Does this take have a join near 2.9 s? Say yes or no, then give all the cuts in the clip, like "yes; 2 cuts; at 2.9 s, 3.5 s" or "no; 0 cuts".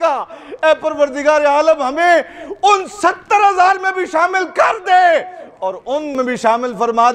no; 1 cut; at 6.2 s